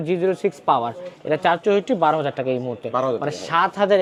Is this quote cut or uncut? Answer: uncut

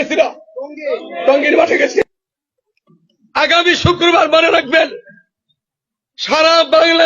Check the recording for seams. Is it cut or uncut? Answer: cut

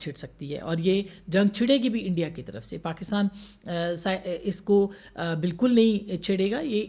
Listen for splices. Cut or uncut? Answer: uncut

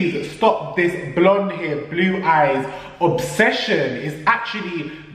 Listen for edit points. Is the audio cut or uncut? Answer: uncut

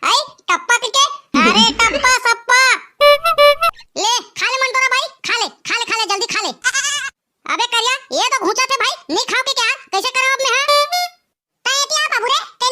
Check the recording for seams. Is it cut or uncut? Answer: cut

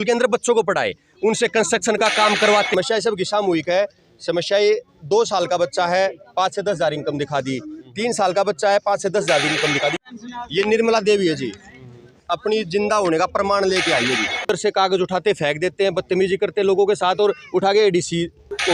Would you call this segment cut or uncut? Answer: cut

